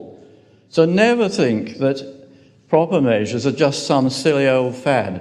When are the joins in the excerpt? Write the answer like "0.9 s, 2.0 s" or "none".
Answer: none